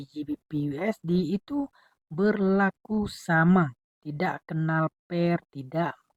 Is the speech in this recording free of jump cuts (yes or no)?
yes